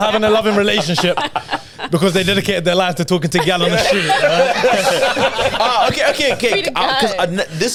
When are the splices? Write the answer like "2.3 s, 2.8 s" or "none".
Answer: none